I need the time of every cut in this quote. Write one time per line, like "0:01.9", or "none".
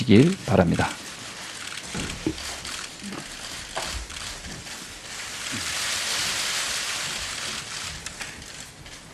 none